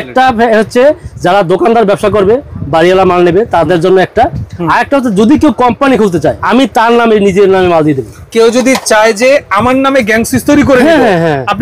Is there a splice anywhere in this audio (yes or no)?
yes